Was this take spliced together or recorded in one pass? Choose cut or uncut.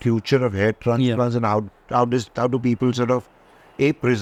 uncut